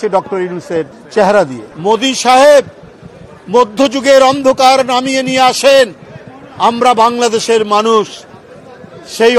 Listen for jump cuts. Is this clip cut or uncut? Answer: cut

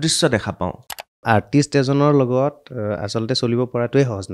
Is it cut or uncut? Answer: cut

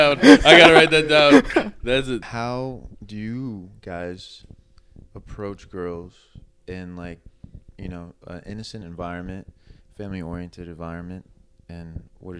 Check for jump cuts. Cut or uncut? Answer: cut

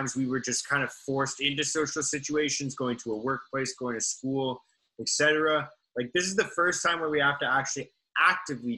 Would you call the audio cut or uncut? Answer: uncut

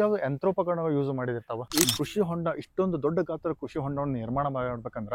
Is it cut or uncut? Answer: cut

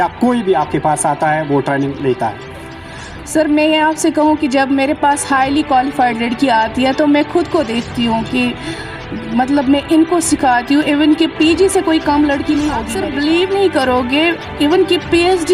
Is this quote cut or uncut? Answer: cut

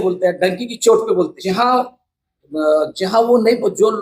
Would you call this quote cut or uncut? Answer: cut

